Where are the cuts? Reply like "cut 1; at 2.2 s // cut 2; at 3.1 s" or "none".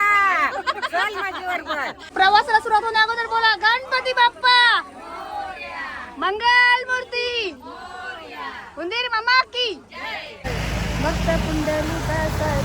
cut 1; at 2.1 s // cut 2; at 10.6 s

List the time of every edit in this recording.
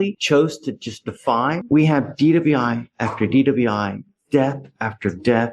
cut 1; at 1.6 s

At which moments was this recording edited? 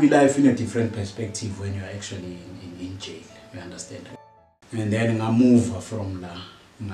cut 1; at 4.1 s

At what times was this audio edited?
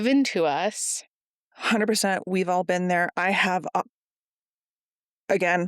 cut 1; at 1.5 s

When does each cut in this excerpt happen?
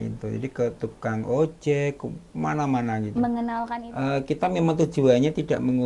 cut 1; at 3.7 s

